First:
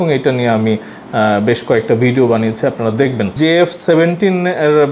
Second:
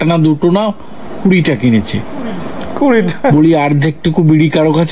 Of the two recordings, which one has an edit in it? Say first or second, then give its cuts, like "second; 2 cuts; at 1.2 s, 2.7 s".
first; 1 cut; at 3.3 s